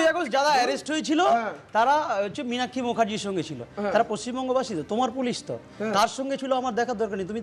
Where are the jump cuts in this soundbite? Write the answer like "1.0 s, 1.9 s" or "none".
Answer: none